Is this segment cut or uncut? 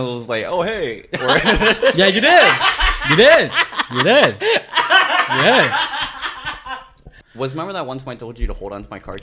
cut